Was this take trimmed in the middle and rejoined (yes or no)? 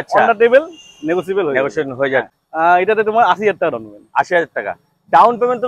yes